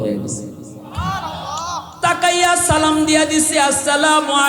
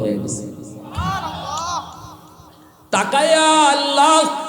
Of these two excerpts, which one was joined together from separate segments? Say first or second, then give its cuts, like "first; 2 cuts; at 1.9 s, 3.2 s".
first; 1 cut; at 1.8 s